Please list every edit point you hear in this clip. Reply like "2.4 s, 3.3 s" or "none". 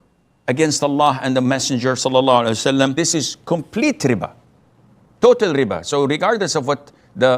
2.9 s